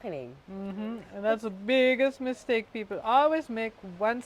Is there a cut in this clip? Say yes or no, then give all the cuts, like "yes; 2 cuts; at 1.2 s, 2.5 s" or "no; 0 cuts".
no; 0 cuts